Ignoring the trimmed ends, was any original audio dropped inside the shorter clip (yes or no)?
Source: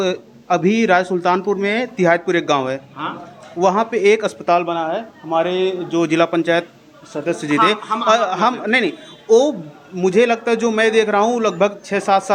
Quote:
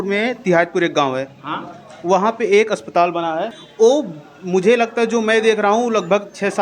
yes